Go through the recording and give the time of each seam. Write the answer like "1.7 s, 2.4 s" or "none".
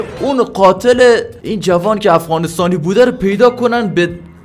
1.4 s